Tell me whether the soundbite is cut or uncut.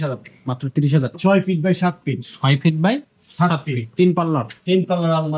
cut